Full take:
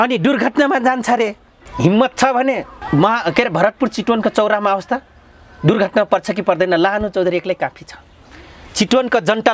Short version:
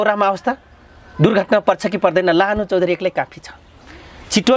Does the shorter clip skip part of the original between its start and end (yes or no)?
no